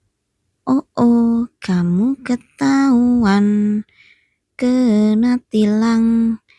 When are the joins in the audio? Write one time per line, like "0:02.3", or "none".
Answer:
none